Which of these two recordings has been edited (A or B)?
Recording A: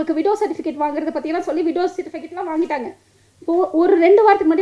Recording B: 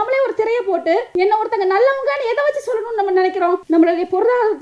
B